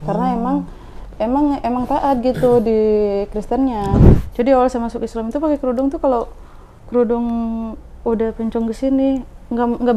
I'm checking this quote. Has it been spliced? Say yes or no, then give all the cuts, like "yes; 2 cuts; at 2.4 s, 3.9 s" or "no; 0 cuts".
yes; 1 cut; at 4.0 s